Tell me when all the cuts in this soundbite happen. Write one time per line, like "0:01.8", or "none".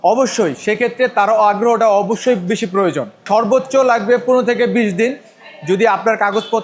0:03.2